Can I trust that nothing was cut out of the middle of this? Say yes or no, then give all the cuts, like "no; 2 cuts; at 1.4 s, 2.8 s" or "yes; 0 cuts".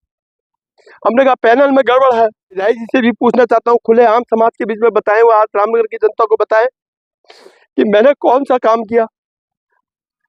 no; 1 cut; at 2.6 s